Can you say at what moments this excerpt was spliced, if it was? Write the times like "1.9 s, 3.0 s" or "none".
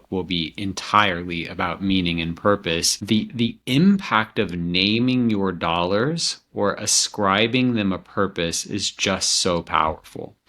2.9 s